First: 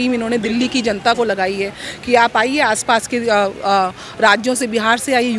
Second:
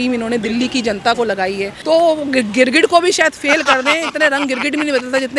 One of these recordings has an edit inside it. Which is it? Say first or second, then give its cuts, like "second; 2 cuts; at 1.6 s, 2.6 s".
second; 1 cut; at 1.7 s